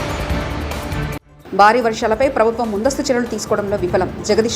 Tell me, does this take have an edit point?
yes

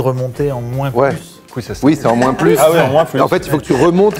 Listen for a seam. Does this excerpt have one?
no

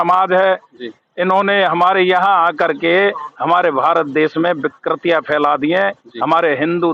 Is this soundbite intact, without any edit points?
yes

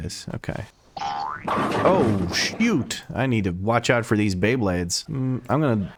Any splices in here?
no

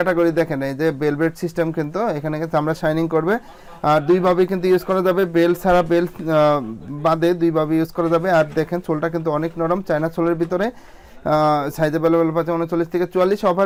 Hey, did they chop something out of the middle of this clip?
no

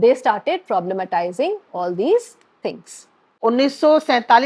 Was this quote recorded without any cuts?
no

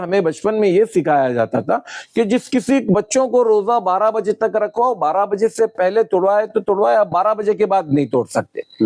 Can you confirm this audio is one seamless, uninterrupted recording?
yes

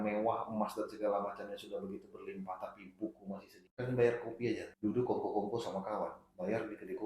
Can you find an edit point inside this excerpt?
yes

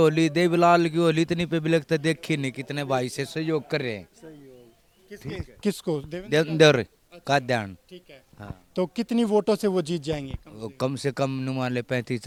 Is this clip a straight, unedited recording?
yes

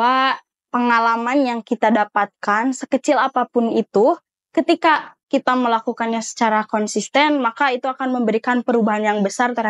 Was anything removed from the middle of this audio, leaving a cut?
no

